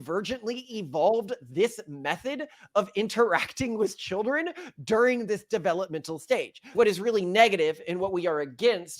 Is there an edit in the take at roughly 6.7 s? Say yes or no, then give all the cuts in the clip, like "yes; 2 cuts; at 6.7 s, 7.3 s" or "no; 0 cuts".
yes; 1 cut; at 6.7 s